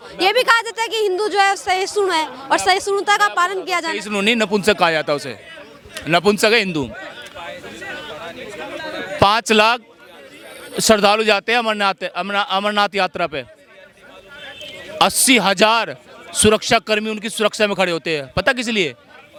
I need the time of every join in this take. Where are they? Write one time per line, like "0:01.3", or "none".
none